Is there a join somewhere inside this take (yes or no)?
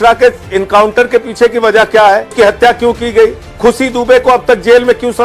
yes